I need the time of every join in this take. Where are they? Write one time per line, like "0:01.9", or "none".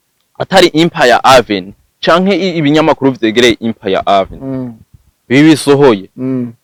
none